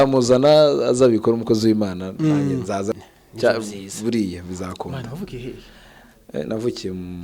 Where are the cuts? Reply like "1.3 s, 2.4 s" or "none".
2.9 s